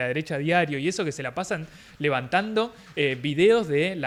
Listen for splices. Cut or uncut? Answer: uncut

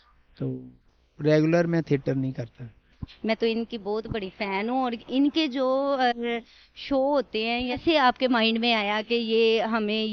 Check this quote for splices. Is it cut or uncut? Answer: cut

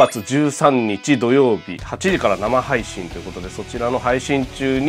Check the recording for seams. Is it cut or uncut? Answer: uncut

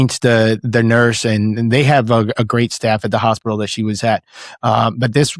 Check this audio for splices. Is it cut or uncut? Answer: uncut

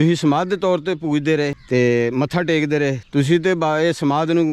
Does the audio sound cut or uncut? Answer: cut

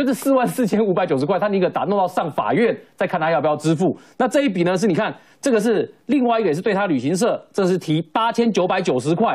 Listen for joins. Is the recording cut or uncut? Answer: uncut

